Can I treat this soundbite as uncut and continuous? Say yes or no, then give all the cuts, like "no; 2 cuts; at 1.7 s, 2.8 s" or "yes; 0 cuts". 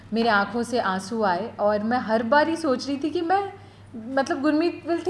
yes; 0 cuts